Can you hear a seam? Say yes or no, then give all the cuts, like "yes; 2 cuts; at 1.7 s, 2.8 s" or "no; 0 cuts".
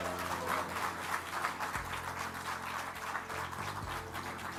no; 0 cuts